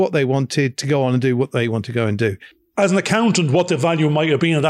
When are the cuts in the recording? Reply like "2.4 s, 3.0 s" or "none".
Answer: 2.5 s